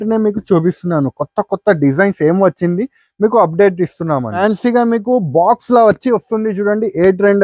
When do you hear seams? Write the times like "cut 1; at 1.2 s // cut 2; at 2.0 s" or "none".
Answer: cut 1; at 4.4 s